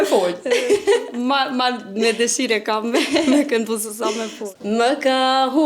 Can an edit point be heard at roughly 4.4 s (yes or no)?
yes